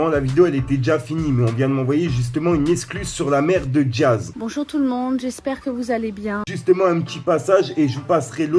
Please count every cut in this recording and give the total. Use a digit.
2